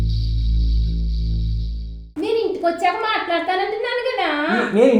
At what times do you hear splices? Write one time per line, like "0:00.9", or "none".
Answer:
0:02.1